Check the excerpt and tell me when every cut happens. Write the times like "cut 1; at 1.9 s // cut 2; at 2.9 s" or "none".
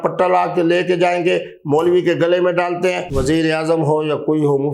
cut 1; at 3.1 s